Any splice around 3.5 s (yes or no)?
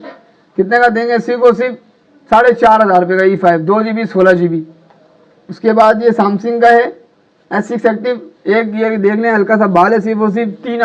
no